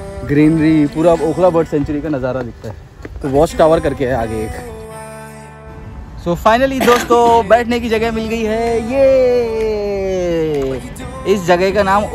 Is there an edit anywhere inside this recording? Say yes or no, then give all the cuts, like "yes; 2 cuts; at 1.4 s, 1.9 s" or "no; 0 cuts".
yes; 1 cut; at 5.2 s